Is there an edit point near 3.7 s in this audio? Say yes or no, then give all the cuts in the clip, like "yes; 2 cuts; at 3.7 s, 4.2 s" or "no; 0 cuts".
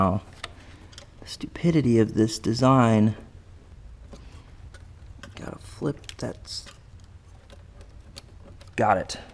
yes; 1 cut; at 3.7 s